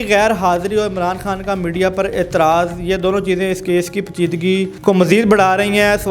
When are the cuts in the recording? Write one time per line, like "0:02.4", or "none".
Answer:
0:04.7